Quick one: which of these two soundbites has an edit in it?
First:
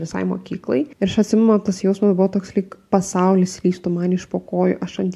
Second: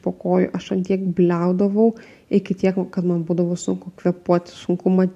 first; 1 cut; at 0.9 s

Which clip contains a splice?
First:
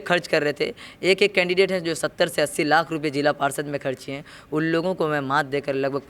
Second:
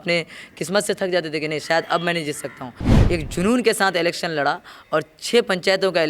second; 1 cut; at 2.8 s

